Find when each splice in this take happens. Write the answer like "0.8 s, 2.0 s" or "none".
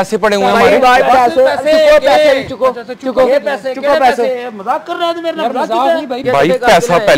6.2 s